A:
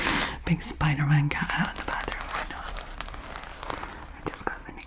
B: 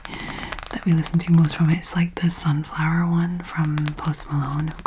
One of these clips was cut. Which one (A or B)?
A